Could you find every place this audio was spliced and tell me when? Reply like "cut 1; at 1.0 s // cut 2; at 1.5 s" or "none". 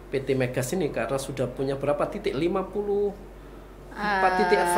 none